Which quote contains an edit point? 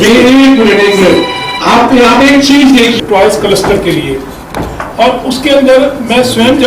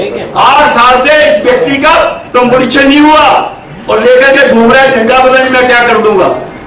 first; 1 cut; at 3.0 s

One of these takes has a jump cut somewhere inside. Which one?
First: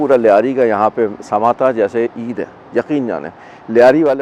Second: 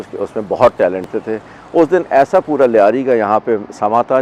second; 1 cut; at 1.1 s

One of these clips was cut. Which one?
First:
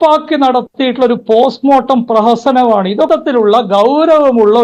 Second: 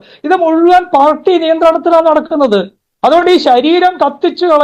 first; 1 cut; at 3.1 s

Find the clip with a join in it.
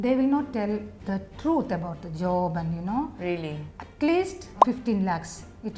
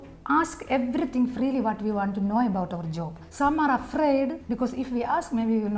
first; 1 cut; at 3.6 s

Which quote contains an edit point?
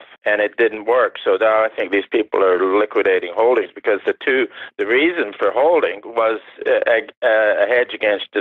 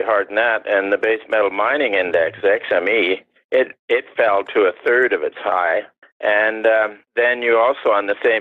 second; 1 cut; at 5.5 s

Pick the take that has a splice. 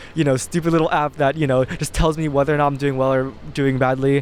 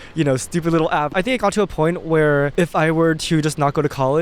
second; 2 cuts; at 1.1 s, 2.5 s

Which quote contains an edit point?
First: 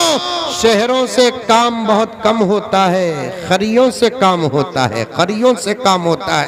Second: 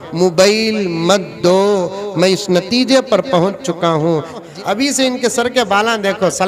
second; 1 cut; at 4.5 s

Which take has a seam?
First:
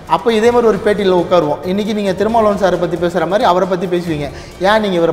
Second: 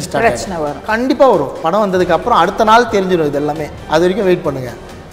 second; 2 cuts; at 1.6 s, 3.7 s

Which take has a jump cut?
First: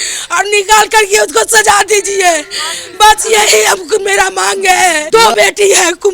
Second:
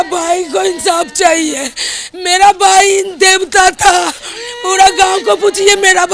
first; 1 cut; at 5.0 s

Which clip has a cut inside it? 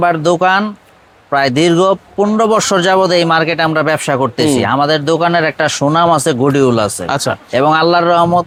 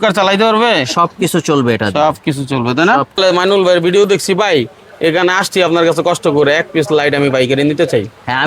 second; 1 cut; at 3.2 s

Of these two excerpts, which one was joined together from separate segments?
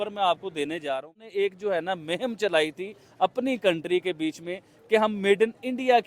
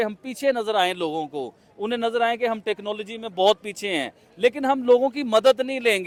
first; 1 cut; at 1.1 s

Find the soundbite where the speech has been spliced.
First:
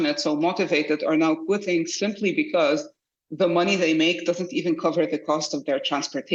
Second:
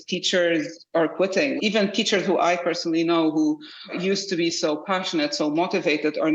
second; 2 cuts; at 1.5 s, 3.9 s

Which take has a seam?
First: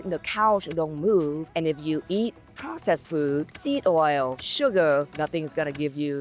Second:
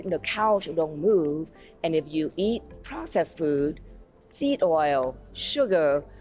first; 4 cuts; at 1.4 s, 3.5 s, 4.4 s, 5.1 s

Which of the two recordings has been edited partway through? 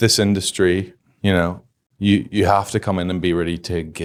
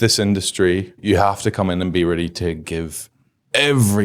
second; 1 cut; at 1.0 s

